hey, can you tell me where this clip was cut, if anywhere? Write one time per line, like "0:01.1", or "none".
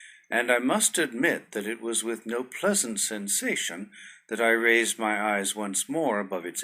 none